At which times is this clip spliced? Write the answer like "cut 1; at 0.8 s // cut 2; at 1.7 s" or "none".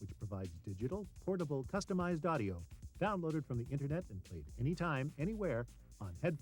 none